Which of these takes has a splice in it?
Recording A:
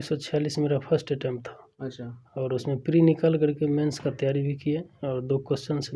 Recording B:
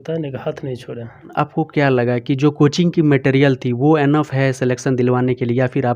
B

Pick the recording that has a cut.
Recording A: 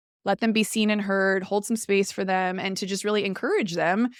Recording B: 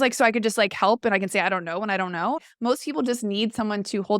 B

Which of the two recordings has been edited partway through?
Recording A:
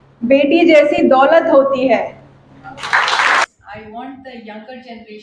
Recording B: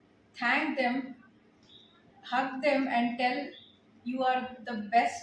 A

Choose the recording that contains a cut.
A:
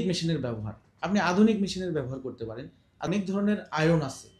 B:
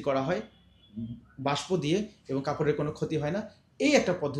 A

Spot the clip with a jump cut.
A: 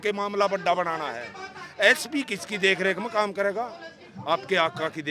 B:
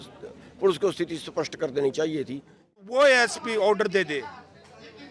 B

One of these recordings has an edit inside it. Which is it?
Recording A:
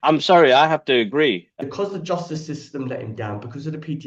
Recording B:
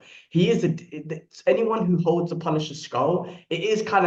A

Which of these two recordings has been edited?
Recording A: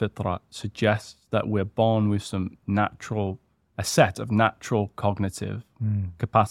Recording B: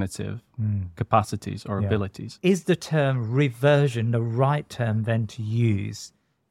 B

